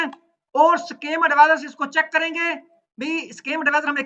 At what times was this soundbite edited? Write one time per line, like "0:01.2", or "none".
none